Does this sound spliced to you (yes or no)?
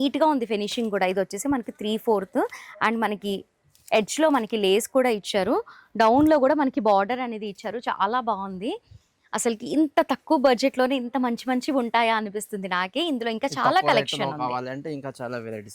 no